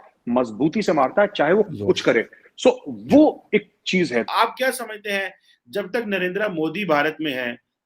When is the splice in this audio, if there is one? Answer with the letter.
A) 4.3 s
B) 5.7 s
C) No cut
A